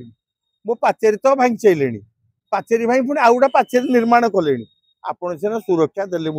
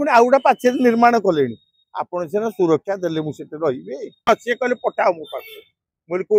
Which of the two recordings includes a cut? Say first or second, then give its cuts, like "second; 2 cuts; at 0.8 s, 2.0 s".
second; 1 cut; at 4.3 s